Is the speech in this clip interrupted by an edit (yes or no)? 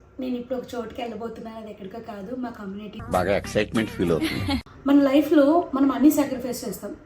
yes